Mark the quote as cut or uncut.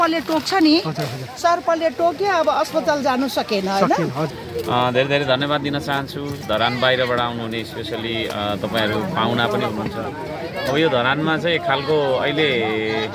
cut